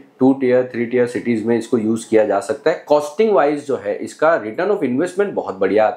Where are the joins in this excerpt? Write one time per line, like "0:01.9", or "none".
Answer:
none